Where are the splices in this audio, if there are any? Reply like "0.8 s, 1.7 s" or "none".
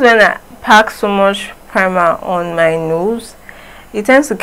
none